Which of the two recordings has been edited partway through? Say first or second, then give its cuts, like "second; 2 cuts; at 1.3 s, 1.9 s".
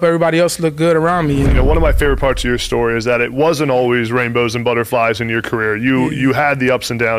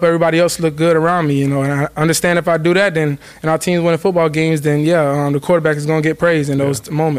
first; 1 cut; at 1.5 s